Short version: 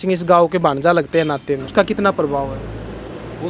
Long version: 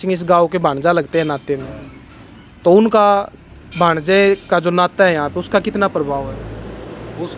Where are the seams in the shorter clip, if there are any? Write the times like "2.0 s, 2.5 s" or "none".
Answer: 1.7 s